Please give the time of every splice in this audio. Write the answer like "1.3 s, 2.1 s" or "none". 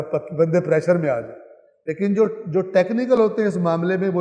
none